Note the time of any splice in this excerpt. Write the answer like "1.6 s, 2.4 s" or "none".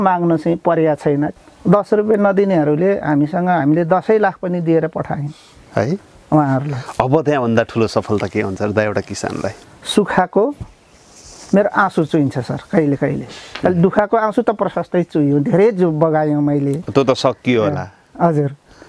1.3 s, 9.6 s